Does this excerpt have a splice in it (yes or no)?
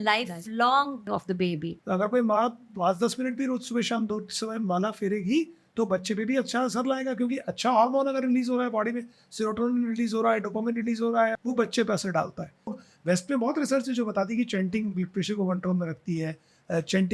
yes